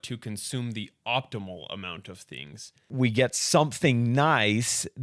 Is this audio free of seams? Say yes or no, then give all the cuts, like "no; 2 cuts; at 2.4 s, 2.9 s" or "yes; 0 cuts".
no; 1 cut; at 2.9 s